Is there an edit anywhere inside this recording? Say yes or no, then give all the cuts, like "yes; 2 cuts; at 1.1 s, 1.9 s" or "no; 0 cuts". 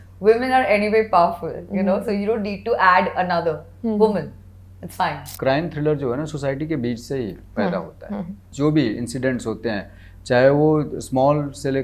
yes; 2 cuts; at 5.2 s, 8.5 s